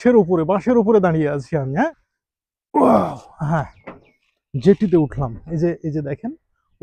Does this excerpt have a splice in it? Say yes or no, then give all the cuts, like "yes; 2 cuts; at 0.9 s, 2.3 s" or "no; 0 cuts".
yes; 1 cut; at 1.9 s